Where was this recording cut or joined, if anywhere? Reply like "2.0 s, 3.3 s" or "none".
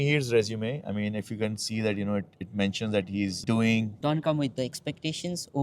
3.9 s